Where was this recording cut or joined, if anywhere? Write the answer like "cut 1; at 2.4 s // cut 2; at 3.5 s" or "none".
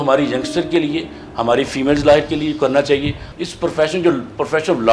cut 1; at 3.2 s